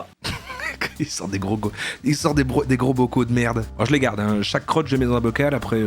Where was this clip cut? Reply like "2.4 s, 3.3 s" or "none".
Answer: 3.7 s